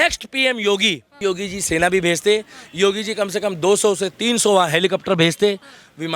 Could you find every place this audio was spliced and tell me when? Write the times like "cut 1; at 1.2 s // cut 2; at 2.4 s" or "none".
cut 1; at 1.2 s

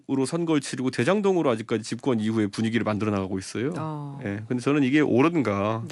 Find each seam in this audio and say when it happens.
none

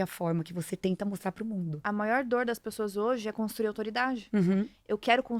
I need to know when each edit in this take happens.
cut 1; at 1.9 s

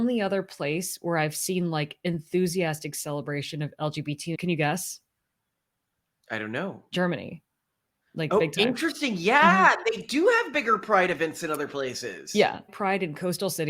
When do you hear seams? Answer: cut 1; at 4.4 s // cut 2; at 12.7 s

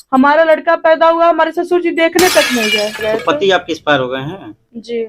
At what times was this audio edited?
cut 1; at 3.0 s

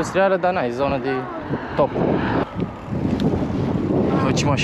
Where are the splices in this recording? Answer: cut 1; at 2.4 s

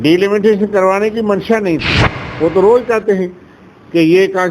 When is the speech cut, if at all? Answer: cut 1; at 2.2 s

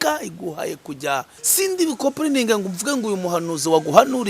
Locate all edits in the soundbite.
cut 1; at 1.4 s

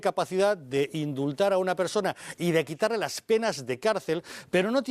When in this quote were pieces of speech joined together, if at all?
cut 1; at 2.9 s

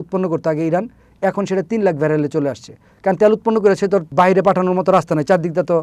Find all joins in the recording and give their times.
cut 1; at 4.1 s

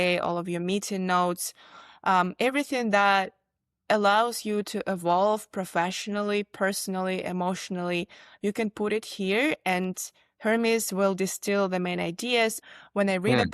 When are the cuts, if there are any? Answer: cut 1; at 12.6 s

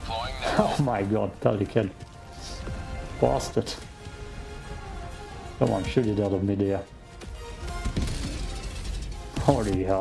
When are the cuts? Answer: none

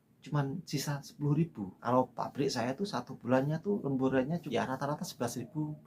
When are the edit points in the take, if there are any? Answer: cut 1; at 1.7 s // cut 2; at 3.9 s

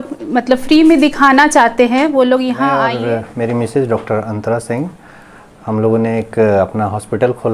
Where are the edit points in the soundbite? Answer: cut 1; at 2.7 s

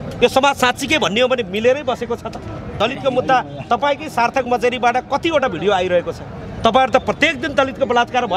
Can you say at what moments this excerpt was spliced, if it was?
cut 1; at 2.7 s

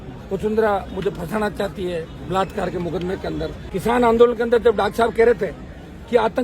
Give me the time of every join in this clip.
cut 1; at 3.6 s

